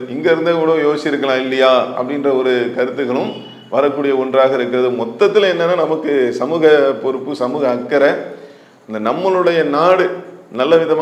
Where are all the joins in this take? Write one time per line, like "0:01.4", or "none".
none